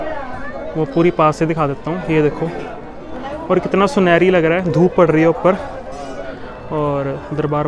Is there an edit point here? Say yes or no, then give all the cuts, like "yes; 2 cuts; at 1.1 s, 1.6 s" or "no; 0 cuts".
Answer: no; 0 cuts